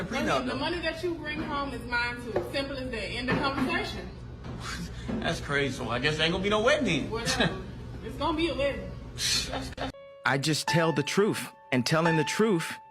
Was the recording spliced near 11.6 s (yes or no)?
no